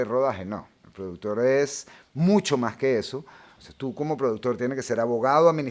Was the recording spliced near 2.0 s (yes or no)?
no